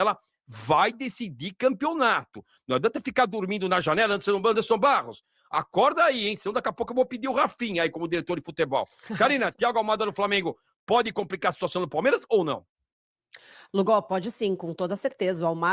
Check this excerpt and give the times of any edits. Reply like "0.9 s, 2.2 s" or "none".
none